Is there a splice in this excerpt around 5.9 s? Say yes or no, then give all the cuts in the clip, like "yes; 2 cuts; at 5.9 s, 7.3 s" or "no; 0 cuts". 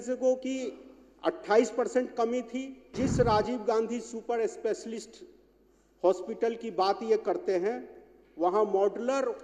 no; 1 cut; at 2.9 s